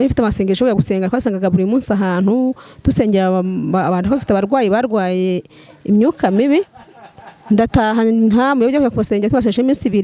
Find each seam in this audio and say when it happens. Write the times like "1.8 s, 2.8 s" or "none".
none